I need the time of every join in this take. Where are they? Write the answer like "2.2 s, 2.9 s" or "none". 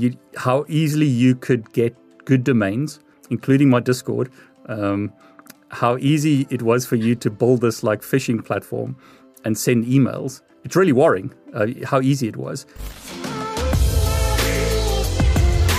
12.8 s